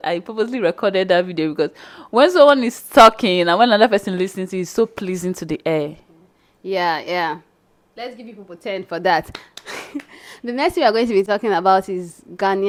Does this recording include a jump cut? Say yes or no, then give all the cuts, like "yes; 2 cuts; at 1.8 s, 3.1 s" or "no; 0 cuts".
no; 0 cuts